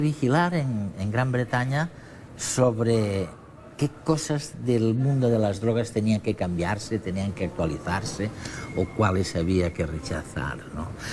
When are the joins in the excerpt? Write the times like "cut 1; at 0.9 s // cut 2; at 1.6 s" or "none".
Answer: cut 1; at 7.2 s